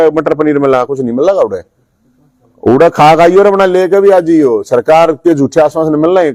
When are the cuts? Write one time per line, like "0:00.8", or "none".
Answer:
none